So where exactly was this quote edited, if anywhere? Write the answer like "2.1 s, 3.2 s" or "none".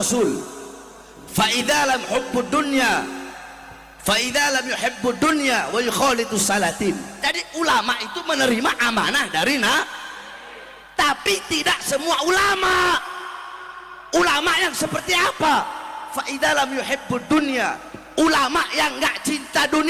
7.1 s